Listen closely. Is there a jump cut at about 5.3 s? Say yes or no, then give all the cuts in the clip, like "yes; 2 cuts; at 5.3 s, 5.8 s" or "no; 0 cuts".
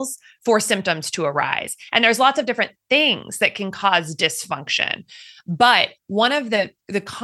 yes; 1 cut; at 5.3 s